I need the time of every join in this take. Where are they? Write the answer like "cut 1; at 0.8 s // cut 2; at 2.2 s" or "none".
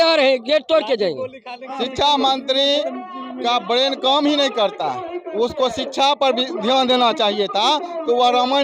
cut 1; at 1.6 s